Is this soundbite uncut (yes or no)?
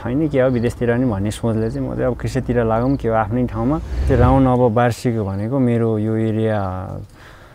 no